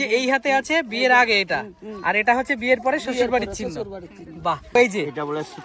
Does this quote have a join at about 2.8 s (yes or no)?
no